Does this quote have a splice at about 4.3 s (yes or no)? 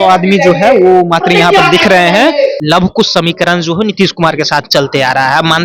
no